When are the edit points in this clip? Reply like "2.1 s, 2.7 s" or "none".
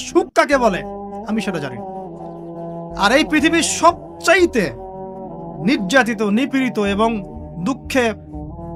none